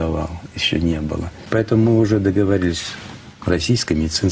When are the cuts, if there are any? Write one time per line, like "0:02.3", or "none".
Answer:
0:01.3